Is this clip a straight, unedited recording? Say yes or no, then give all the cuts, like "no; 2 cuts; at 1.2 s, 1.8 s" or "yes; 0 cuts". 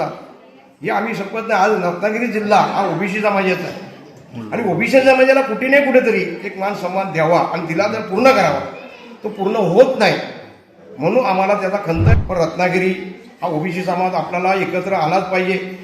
no; 1 cut; at 12.1 s